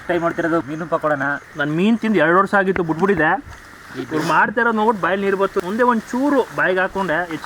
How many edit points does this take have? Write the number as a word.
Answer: two